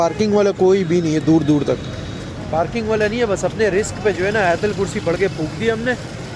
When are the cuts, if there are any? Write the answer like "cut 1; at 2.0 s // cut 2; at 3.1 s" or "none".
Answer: none

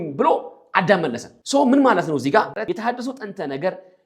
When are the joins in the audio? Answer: cut 1; at 1.3 s // cut 2; at 2.6 s

